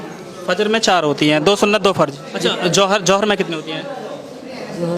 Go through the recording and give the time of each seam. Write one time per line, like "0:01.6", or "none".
0:02.2